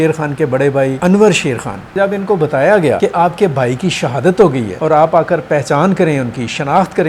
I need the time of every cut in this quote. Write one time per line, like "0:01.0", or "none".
0:01.0
0:02.0
0:03.0
0:04.7